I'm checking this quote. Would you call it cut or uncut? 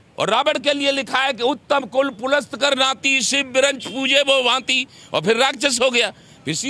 uncut